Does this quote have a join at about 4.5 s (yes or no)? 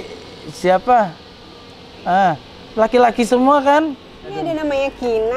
yes